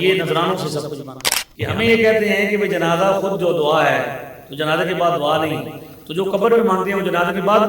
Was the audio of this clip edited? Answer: yes; 1 cut; at 1.1 s

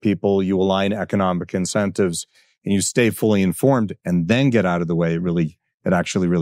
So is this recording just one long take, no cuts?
yes; 0 cuts

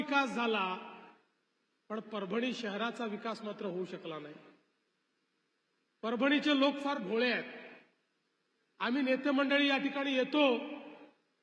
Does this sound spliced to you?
no; 0 cuts

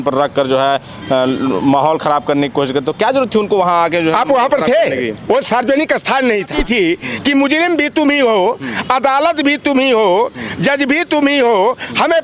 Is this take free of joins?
no; 1 cut; at 6.5 s

